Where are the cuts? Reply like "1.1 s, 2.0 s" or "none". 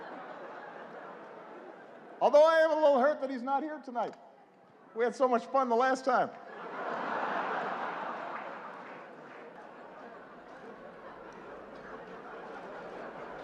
9.6 s